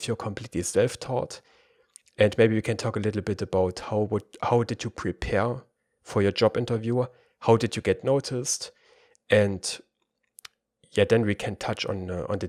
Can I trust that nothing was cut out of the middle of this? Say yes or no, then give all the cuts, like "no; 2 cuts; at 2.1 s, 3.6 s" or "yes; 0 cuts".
yes; 0 cuts